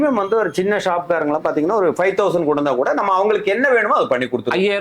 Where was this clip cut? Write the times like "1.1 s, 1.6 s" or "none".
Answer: none